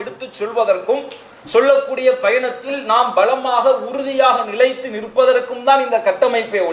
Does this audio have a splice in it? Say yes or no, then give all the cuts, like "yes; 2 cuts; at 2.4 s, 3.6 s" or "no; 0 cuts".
no; 0 cuts